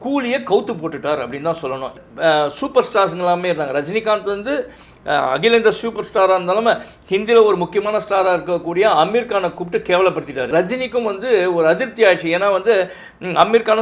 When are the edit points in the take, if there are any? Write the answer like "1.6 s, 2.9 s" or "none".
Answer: 2.0 s, 10.5 s